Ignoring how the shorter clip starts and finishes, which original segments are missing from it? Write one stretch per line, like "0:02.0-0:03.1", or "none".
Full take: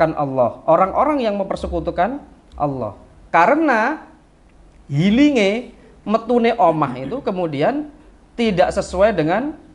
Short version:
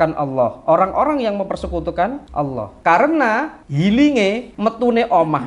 0:02.4-0:02.9
0:04.1-0:04.8
0:05.7-0:06.0